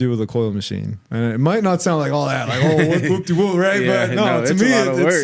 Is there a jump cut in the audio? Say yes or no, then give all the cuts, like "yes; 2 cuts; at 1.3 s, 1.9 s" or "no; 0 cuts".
yes; 1 cut; at 1.0 s